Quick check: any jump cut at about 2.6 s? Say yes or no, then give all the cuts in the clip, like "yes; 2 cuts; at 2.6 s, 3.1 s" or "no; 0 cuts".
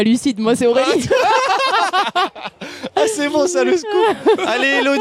no; 0 cuts